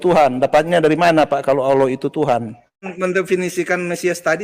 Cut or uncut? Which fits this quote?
cut